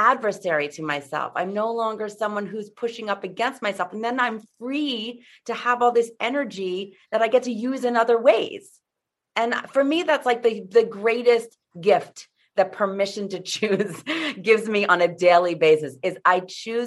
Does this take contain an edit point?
no; 0 cuts

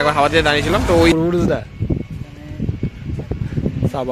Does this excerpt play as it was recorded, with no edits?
no; 1 cut; at 1.1 s

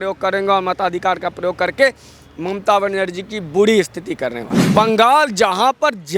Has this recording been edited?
yes; 1 cut; at 4.7 s

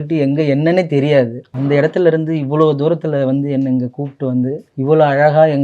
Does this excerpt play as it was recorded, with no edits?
no; 2 cuts; at 1.5 s, 4.7 s

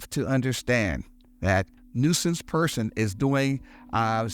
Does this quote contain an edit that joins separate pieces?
yes; 1 cut; at 1.8 s

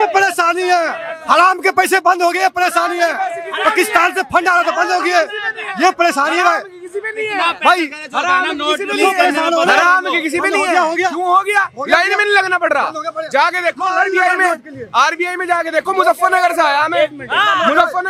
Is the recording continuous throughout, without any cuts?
yes; 0 cuts

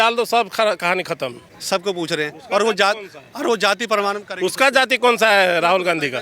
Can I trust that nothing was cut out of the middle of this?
no; 1 cut; at 1.5 s

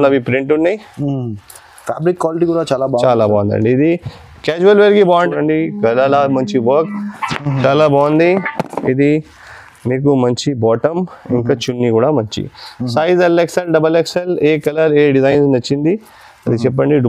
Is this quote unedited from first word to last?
no; 1 cut; at 5.3 s

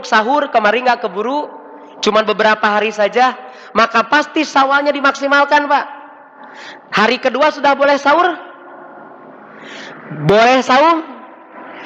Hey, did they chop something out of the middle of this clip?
no; 0 cuts

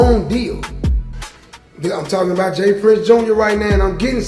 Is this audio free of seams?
no; 1 cut; at 1.1 s

